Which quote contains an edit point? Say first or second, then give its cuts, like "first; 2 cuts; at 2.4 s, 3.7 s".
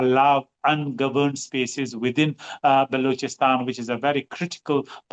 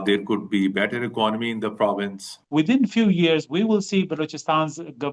second; 1 cut; at 2.3 s